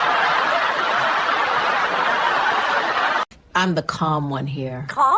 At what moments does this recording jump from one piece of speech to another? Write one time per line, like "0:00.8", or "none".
none